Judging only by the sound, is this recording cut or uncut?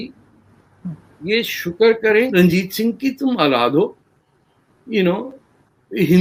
cut